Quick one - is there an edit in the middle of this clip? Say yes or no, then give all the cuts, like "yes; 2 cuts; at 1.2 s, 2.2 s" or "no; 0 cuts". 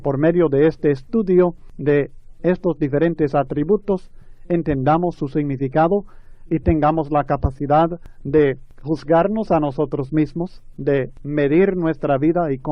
yes; 4 cuts; at 1.7 s, 8.1 s, 8.7 s, 11.2 s